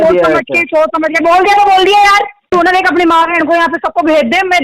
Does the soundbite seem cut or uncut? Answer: cut